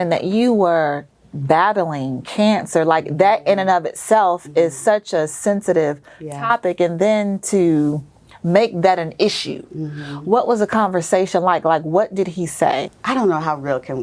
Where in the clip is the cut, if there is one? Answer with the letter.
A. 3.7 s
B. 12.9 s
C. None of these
B